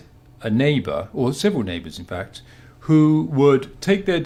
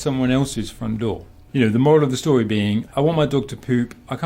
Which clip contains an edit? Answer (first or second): second